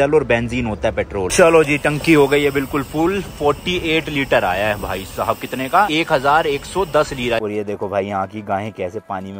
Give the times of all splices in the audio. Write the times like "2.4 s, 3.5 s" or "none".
1.3 s, 5.9 s, 7.4 s